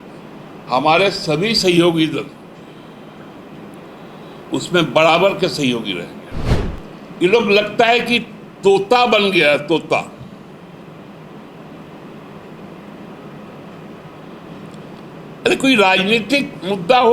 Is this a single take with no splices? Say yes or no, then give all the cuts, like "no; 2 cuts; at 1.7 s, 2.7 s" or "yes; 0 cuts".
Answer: no; 1 cut; at 6.6 s